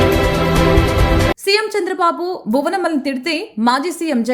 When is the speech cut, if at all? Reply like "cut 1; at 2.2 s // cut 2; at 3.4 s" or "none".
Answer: cut 1; at 1.3 s

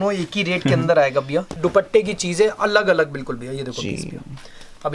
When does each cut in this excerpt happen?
cut 1; at 1.5 s

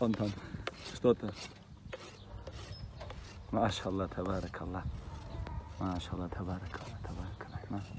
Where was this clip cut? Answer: none

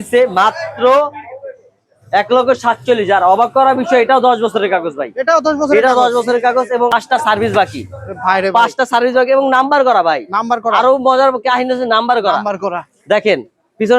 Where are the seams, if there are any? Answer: cut 1; at 6.9 s

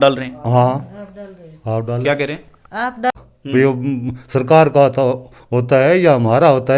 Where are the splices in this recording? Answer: cut 1; at 3.1 s

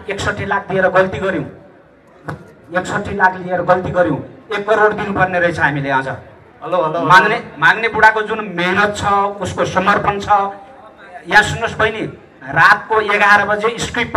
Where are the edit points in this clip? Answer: none

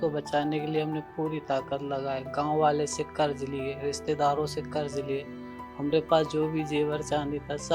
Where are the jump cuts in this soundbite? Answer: none

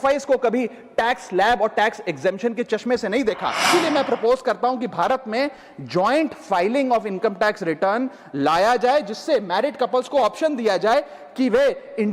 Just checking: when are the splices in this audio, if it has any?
cut 1; at 3.7 s

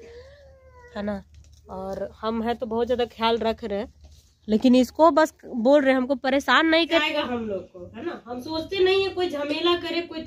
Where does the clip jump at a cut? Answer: cut 1; at 7.0 s

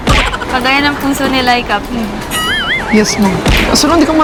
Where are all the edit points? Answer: none

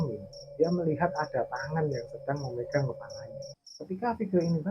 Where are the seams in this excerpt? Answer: cut 1; at 3.5 s

